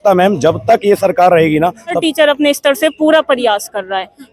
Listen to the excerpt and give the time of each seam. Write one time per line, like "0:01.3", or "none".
0:02.0